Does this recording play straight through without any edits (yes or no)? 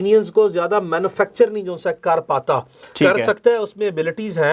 yes